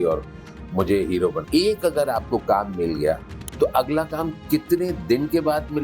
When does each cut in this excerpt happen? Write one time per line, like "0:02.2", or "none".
0:01.4